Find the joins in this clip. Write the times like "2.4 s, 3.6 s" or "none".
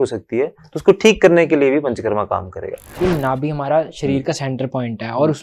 2.9 s